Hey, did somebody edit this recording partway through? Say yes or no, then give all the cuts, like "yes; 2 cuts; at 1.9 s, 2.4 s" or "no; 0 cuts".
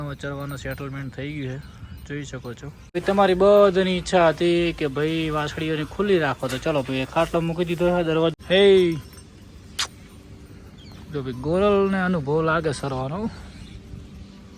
yes; 2 cuts; at 2.8 s, 8.4 s